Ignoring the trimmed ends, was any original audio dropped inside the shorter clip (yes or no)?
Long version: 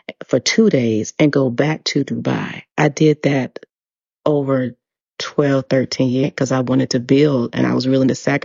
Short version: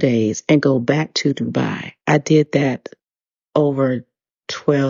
no